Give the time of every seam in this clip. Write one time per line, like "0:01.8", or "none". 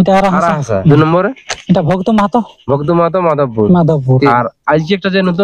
0:00.9
0:04.3